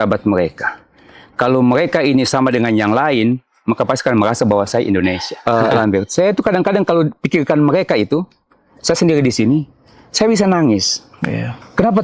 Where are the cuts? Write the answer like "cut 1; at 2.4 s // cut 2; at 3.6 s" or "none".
cut 1; at 5.3 s

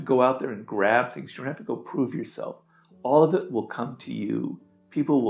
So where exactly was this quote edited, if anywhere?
none

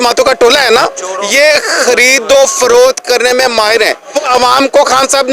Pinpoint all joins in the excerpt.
cut 1; at 4.3 s

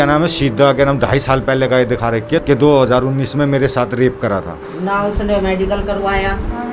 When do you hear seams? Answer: cut 1; at 2.4 s // cut 2; at 4.6 s

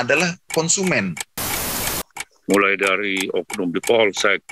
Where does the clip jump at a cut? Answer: cut 1; at 1.7 s

